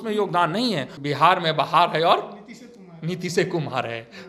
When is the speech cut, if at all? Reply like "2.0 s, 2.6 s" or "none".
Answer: 0.9 s